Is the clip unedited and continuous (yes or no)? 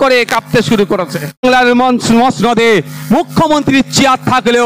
no